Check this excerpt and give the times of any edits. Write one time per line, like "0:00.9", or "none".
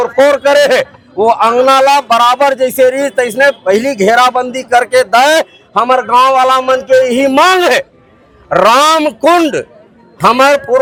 none